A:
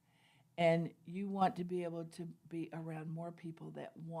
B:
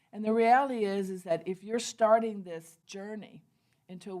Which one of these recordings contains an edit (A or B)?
B